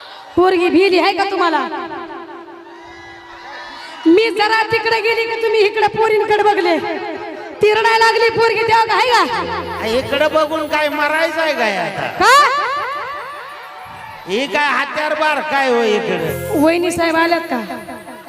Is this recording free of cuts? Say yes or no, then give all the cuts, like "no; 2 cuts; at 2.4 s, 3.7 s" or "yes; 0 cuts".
no; 1 cut; at 16.4 s